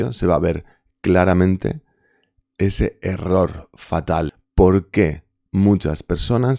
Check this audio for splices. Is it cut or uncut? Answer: cut